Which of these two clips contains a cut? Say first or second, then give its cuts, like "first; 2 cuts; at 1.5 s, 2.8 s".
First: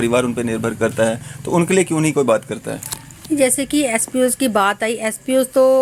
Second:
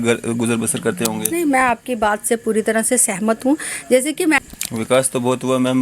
second; 1 cut; at 4.4 s